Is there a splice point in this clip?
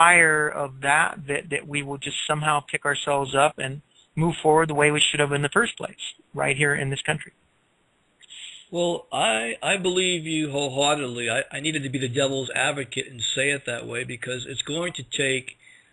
yes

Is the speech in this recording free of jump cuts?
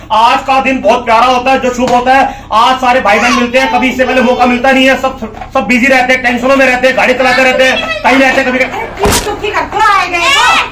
yes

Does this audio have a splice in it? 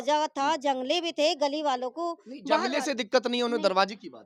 no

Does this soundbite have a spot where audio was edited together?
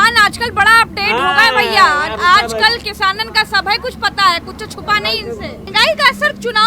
yes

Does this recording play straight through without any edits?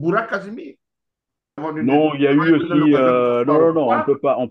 no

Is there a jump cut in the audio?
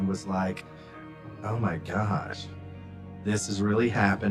no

